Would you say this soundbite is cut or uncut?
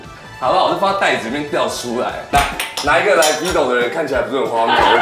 cut